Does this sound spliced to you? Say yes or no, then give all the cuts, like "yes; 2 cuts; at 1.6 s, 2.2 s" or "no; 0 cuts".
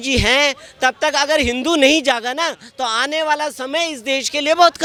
no; 0 cuts